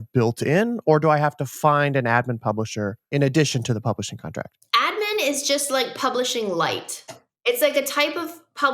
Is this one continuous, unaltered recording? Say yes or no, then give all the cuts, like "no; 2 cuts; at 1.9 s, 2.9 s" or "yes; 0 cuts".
no; 3 cuts; at 3.0 s, 4.6 s, 7.3 s